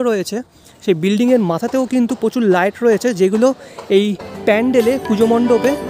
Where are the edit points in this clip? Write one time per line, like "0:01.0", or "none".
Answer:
none